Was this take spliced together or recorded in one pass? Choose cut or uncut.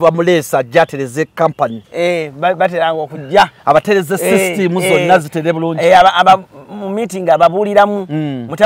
uncut